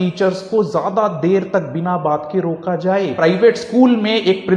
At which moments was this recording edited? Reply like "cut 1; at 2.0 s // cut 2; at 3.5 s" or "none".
cut 1; at 3.2 s